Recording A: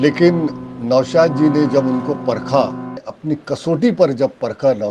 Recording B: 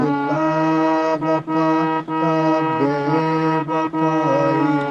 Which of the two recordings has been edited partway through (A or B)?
A